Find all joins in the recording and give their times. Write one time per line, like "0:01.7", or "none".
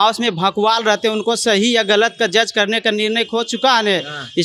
none